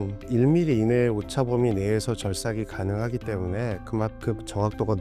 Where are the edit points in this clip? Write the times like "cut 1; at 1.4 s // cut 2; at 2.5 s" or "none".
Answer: none